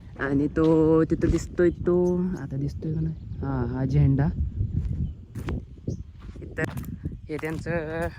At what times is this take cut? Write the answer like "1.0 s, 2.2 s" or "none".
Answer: 6.6 s